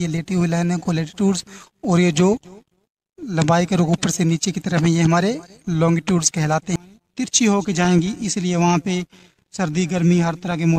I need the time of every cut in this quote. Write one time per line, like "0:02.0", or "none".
0:06.8